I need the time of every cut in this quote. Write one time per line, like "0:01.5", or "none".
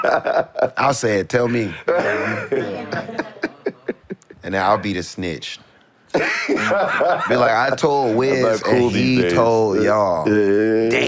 none